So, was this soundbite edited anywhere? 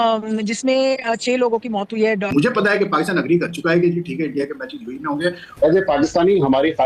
yes; 2 cuts; at 2.3 s, 5.6 s

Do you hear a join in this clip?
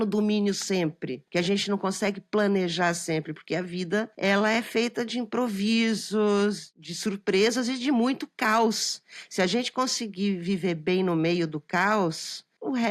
yes; 3 cuts; at 1.1 s, 4.1 s, 6.7 s

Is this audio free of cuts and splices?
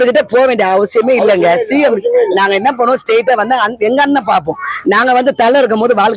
yes; 0 cuts

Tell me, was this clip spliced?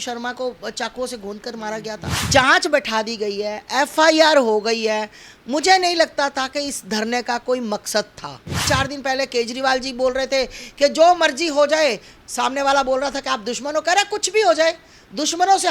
yes; 2 cuts; at 2.2 s, 8.6 s

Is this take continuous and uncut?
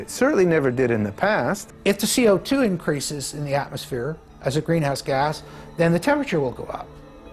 no; 1 cut; at 1.7 s

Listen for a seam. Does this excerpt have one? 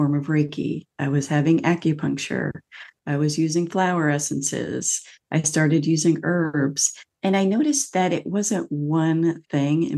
no; 0 cuts

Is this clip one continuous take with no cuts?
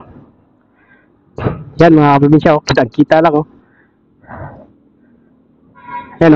yes; 0 cuts

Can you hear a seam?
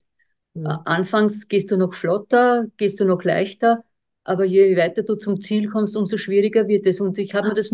no; 0 cuts

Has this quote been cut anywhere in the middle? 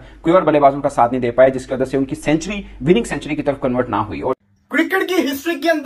yes; 1 cut; at 4.4 s

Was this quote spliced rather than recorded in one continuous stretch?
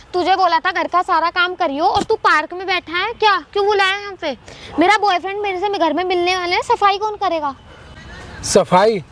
no; 0 cuts

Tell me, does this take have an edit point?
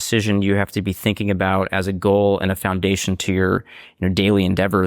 no; 0 cuts

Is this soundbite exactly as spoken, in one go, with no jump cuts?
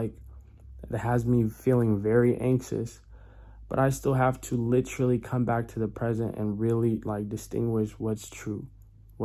yes; 0 cuts

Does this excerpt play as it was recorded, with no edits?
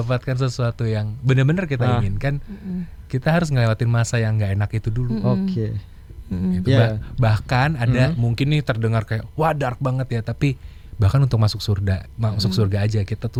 yes; 0 cuts

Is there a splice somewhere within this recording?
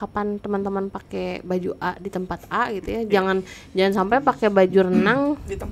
no; 0 cuts

